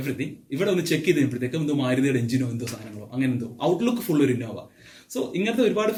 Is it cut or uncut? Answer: uncut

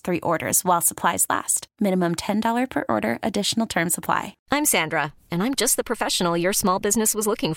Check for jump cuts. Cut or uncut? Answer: cut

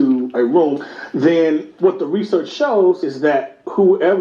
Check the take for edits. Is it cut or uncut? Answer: cut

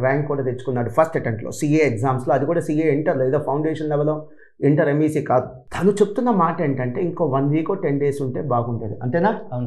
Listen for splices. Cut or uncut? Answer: uncut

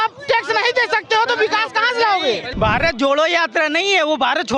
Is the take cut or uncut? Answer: cut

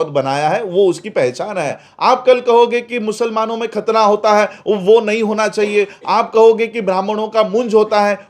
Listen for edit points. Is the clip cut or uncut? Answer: cut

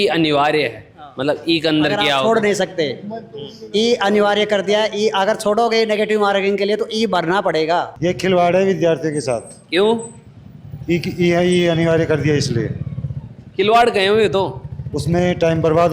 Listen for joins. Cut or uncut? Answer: cut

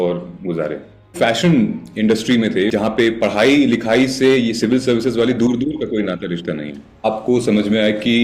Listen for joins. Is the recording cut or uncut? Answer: cut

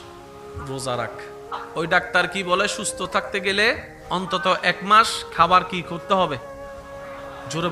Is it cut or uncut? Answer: uncut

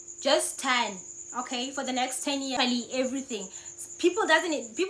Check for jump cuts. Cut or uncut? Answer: cut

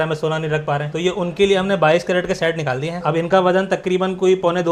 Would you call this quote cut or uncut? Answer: uncut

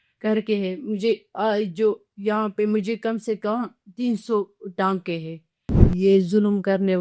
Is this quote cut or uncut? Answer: cut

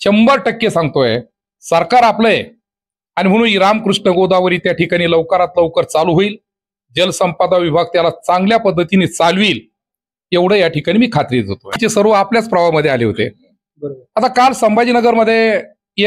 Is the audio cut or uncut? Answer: cut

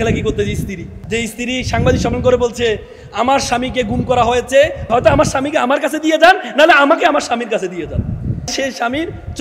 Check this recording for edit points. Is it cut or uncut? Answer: cut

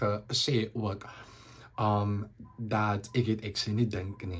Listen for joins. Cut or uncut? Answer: uncut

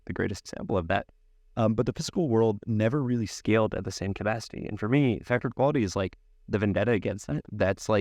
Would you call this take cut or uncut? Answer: uncut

